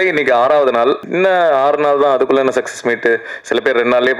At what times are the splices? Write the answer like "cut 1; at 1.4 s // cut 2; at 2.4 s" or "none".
cut 1; at 1.1 s